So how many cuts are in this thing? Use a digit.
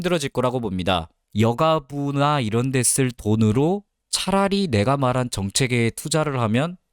1